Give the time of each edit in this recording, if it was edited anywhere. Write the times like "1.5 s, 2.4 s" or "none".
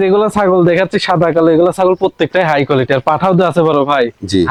none